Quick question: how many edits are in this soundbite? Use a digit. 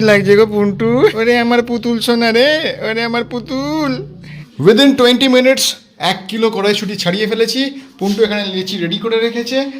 2